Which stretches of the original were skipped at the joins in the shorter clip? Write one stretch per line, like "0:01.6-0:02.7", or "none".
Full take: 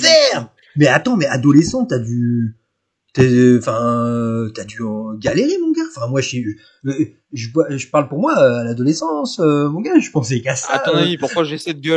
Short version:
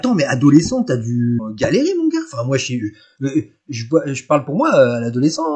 0:02.5-0:05.1